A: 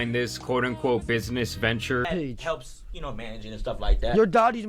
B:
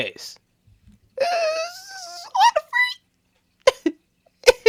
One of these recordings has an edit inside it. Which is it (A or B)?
A